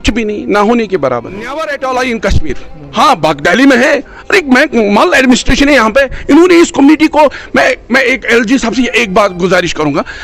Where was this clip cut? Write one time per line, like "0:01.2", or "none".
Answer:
0:01.6